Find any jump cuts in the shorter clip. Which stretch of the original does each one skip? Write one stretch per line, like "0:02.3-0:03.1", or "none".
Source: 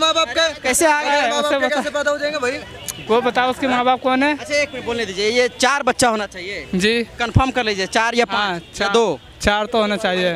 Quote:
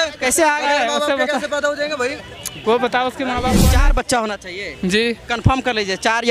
0:04.0-0:05.5